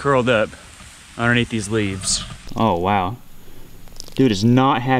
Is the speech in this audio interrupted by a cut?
yes; 1 cut; at 2.4 s

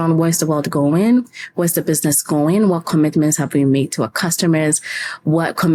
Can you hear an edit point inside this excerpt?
no; 0 cuts

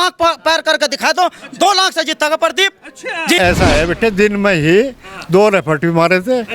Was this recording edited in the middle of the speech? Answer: yes; 1 cut; at 3.4 s

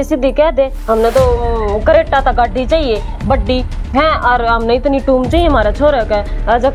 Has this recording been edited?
no; 0 cuts

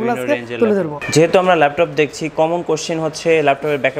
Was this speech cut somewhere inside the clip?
yes; 1 cut; at 1.0 s

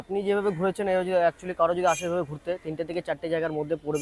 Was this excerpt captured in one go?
yes; 0 cuts

